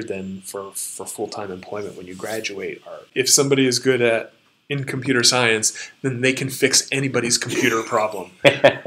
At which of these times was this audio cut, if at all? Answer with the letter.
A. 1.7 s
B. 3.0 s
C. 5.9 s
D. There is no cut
B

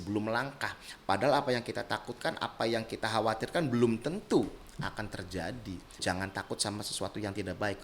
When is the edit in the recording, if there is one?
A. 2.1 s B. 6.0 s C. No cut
B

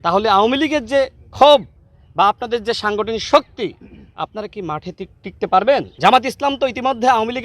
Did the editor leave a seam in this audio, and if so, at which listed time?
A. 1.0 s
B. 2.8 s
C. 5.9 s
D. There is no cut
C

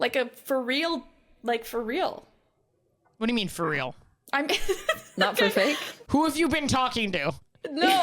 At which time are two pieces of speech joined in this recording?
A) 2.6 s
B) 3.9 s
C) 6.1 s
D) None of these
C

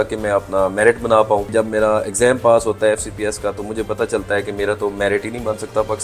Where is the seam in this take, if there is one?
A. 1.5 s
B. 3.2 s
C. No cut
A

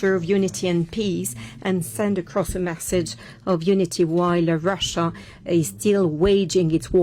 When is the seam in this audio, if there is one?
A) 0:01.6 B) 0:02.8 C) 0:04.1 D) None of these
D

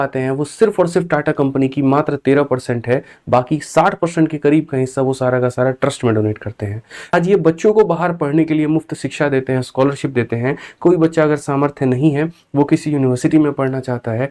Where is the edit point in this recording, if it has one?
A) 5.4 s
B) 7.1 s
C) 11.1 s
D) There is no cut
B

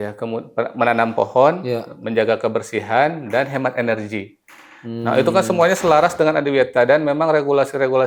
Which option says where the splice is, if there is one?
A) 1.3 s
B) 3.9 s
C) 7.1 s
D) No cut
D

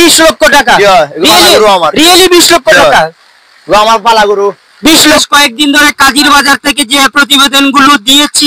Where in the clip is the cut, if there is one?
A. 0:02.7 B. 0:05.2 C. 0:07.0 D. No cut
B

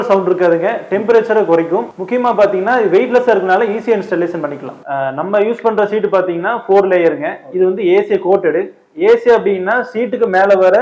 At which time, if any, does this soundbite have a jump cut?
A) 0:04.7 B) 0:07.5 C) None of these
A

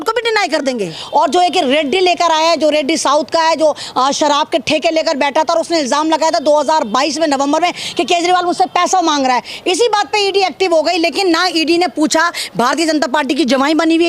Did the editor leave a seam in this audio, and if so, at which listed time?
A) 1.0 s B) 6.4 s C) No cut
A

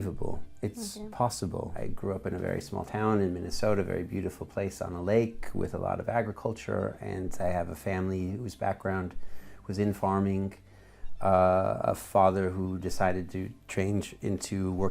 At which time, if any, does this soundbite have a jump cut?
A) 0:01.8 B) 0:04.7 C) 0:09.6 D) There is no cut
A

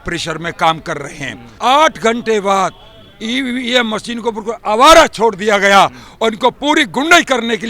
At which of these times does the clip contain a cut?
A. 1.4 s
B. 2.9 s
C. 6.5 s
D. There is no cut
A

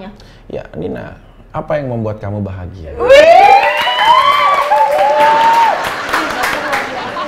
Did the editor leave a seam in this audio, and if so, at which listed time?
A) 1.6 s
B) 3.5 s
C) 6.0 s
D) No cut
D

